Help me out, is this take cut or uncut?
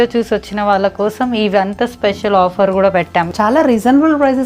cut